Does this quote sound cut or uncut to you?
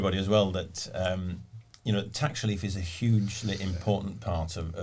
uncut